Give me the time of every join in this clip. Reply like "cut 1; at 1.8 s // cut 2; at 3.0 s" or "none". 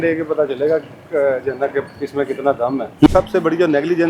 cut 1; at 3.1 s